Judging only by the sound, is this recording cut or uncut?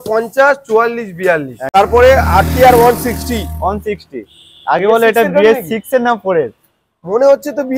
cut